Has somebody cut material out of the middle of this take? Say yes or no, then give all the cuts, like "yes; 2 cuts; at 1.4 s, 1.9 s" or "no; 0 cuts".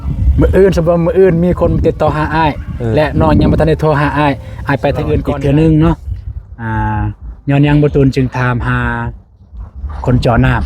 yes; 1 cut; at 5.2 s